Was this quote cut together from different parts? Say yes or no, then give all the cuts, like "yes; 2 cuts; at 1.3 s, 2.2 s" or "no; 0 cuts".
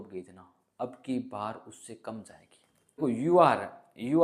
yes; 1 cut; at 3.0 s